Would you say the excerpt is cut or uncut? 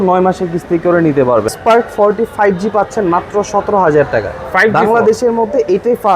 cut